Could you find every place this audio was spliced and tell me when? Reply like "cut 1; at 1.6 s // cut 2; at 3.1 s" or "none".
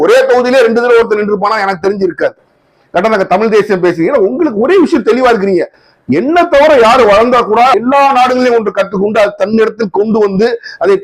cut 1; at 7.7 s